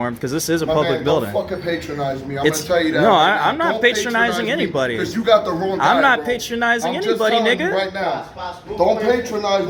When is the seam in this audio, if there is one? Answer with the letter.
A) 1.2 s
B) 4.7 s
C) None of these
C